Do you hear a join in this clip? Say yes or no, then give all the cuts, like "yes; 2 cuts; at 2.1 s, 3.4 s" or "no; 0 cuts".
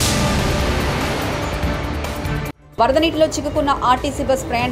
no; 0 cuts